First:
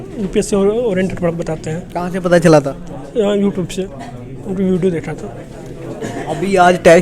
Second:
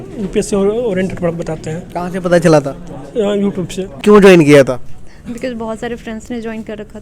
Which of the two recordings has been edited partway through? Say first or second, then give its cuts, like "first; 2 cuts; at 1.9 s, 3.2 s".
second; 1 cut; at 4.0 s